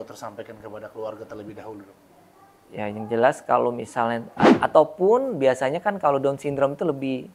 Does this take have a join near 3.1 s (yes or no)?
no